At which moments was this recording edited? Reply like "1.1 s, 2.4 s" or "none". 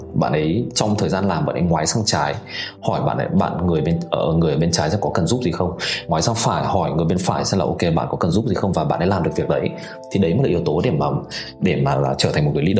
none